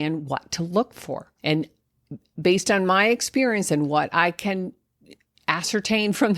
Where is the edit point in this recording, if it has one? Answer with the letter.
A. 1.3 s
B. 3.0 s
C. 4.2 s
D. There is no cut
A